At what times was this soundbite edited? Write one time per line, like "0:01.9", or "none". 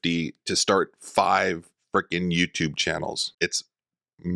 0:03.3